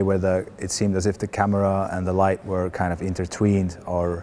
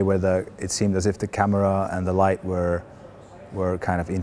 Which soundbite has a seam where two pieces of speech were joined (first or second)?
first